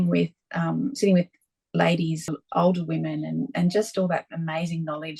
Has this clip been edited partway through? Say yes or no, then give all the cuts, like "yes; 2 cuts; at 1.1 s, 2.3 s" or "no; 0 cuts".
yes; 1 cut; at 2.3 s